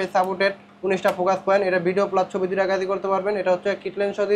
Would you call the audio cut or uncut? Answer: uncut